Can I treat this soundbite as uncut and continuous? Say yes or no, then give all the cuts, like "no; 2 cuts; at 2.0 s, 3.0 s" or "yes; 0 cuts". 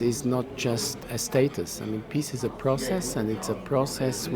no; 1 cut; at 1.0 s